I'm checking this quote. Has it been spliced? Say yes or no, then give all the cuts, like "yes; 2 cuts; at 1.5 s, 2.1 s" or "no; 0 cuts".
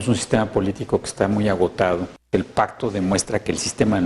yes; 1 cut; at 2.1 s